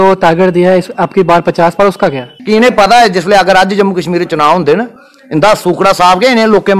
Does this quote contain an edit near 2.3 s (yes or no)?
yes